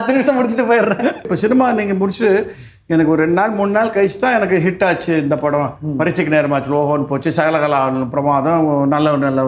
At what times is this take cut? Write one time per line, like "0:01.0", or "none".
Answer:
0:01.2